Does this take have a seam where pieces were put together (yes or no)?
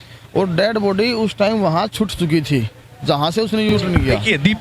yes